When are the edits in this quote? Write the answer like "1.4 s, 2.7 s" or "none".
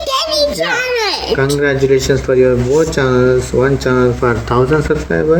none